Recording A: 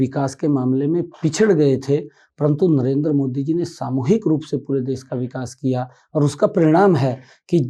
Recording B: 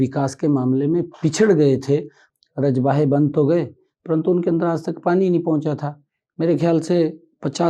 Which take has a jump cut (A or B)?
B